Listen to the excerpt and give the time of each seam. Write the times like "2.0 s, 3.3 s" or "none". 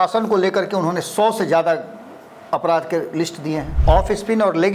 3.7 s